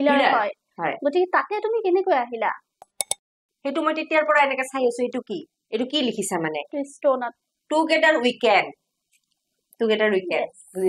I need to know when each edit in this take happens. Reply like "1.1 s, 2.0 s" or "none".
3.3 s